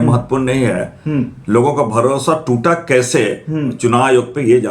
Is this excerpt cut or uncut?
uncut